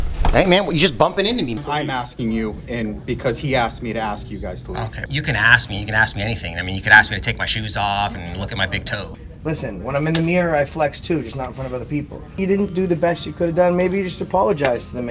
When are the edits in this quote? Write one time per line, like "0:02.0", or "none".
0:01.6
0:05.0
0:09.1
0:12.4